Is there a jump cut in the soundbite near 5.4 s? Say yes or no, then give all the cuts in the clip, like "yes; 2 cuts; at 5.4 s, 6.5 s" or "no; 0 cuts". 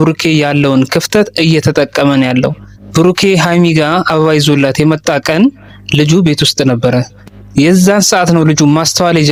no; 0 cuts